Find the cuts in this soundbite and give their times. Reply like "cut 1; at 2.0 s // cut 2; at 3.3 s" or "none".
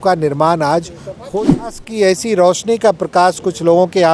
cut 1; at 1.7 s